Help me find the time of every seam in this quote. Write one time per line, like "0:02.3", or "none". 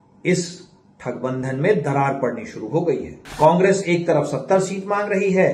0:03.2

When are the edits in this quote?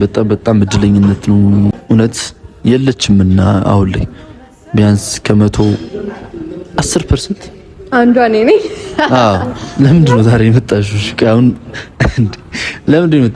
0:01.8
0:09.6

